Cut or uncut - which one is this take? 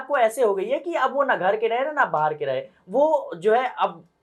uncut